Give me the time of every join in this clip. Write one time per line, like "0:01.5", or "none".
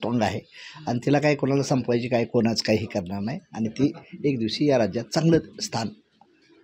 none